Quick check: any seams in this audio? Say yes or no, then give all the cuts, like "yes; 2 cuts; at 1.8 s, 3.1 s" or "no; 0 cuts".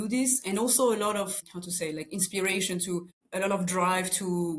yes; 2 cuts; at 1.4 s, 3.2 s